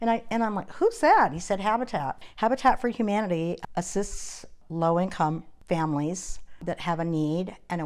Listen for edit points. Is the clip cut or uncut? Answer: cut